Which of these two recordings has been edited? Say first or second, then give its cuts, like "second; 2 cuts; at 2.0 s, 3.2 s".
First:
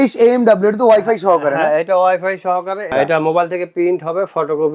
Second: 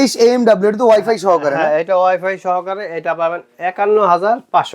first; 1 cut; at 2.9 s